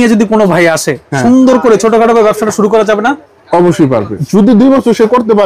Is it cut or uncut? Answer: cut